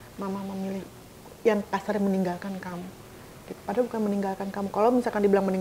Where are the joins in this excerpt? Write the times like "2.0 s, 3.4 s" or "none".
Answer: none